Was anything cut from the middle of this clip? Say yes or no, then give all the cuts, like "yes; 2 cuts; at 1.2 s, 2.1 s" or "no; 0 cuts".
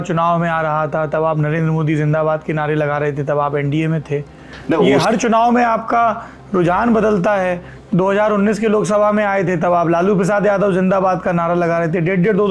no; 0 cuts